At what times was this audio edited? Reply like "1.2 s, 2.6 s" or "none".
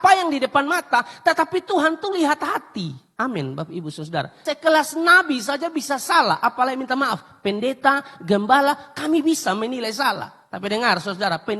4.4 s